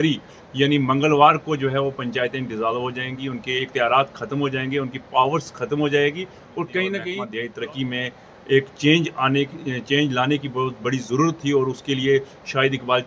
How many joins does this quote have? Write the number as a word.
one